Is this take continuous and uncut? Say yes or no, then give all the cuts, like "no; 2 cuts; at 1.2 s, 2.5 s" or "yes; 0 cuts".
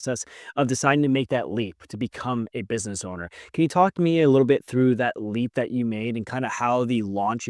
yes; 0 cuts